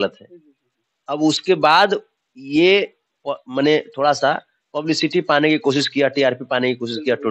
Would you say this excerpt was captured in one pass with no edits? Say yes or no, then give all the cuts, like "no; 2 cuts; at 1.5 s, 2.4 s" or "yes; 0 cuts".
yes; 0 cuts